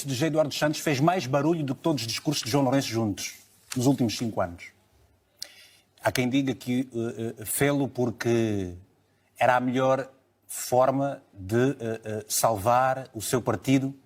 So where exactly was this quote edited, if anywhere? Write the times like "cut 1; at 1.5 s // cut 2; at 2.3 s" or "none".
none

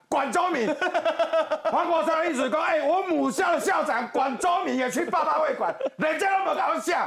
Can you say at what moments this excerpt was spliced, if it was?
none

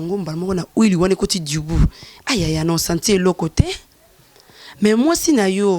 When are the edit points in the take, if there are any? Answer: none

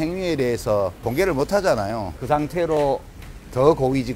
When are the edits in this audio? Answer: cut 1; at 1.0 s // cut 2; at 2.1 s

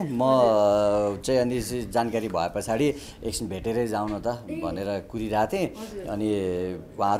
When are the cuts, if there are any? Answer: none

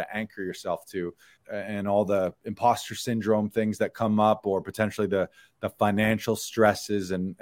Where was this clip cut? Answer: cut 1; at 1.3 s

